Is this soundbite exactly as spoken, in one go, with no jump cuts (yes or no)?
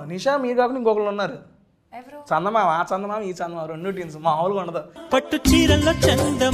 yes